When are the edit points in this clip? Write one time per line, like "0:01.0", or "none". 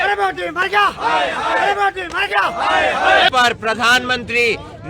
0:03.3